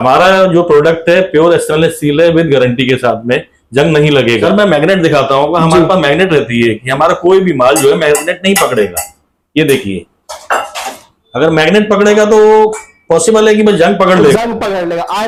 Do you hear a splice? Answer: no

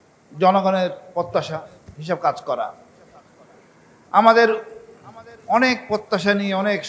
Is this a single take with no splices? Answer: yes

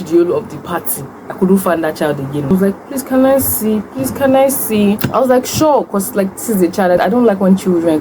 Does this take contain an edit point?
yes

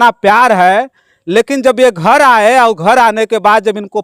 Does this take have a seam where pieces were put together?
no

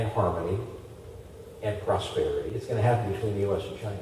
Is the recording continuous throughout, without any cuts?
no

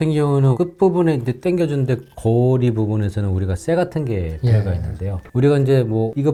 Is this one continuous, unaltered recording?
yes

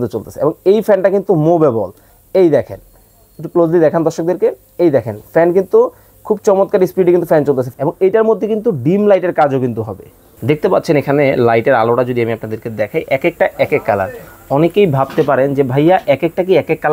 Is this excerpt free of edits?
no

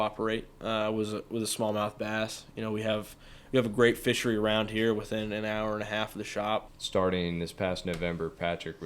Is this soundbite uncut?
no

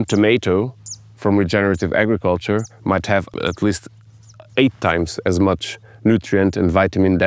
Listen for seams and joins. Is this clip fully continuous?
no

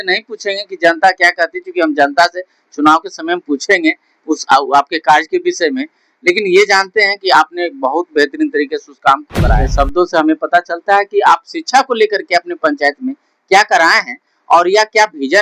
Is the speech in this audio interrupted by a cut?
yes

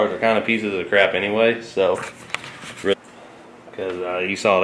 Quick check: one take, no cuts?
no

